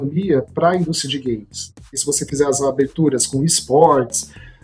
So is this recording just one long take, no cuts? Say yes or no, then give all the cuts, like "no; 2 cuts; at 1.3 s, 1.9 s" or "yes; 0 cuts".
no; 1 cut; at 1.9 s